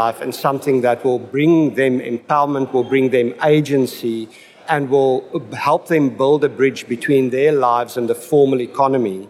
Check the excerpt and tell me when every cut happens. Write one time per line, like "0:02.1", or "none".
0:04.6